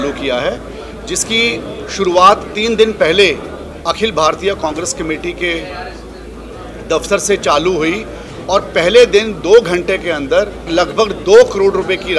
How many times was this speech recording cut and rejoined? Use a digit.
1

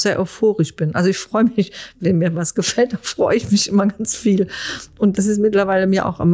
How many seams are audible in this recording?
2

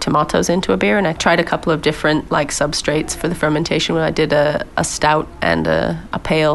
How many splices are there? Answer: 1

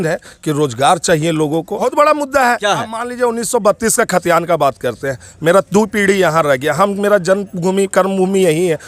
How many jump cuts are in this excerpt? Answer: 1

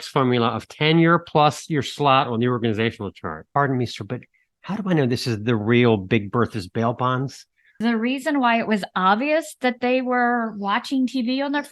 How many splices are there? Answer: 2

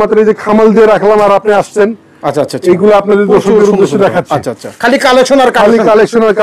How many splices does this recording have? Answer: 1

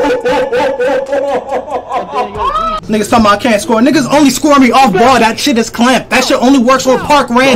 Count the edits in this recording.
1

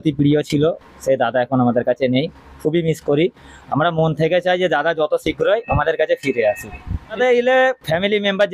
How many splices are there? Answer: 1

